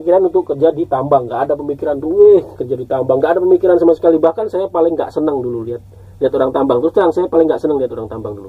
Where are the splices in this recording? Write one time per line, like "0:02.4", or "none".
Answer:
none